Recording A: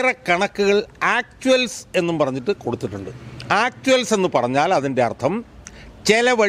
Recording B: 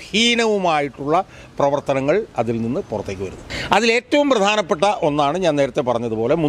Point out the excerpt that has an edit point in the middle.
B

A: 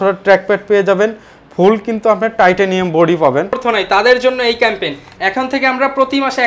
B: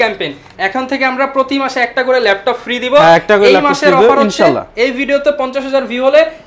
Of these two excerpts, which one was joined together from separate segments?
A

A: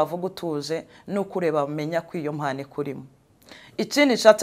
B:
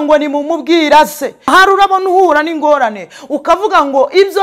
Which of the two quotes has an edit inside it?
B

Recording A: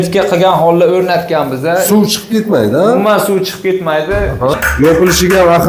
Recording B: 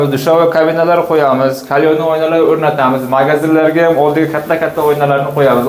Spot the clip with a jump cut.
A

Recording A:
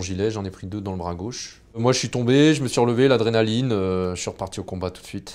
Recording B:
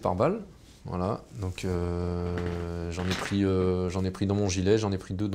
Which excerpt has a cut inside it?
A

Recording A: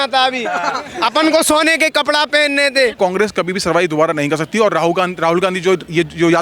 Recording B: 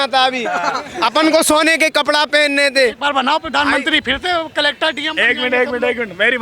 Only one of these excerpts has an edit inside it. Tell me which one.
A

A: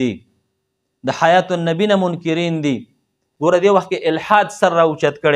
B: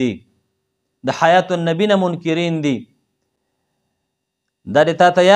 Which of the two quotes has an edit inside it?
A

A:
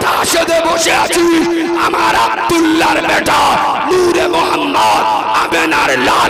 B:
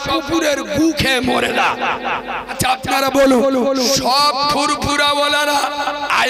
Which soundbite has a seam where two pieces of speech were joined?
B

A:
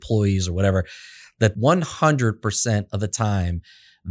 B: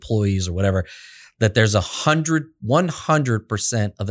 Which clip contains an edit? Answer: A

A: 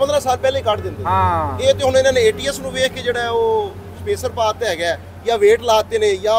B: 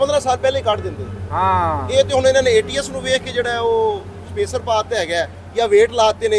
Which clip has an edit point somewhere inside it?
A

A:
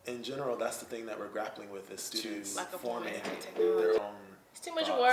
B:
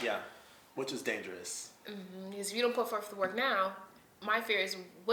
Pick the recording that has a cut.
A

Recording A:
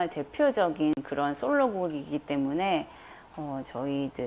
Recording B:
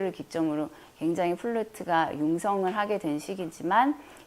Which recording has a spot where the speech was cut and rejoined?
B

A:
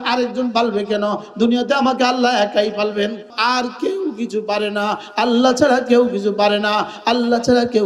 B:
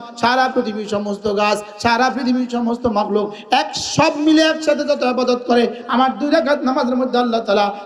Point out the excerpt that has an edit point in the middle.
A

